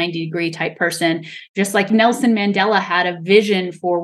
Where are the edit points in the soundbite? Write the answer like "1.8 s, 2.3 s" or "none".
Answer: 1.9 s

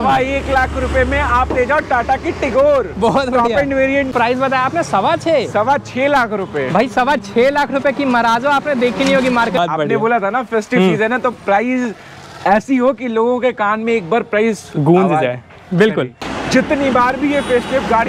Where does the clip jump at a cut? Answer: 4.1 s, 9.6 s, 16.2 s

